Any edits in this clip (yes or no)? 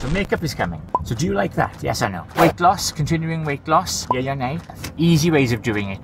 yes